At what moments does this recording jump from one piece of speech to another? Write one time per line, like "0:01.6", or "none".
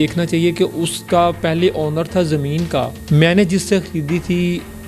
0:01.0
0:03.0